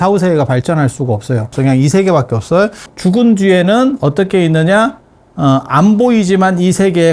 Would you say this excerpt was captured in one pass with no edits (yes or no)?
no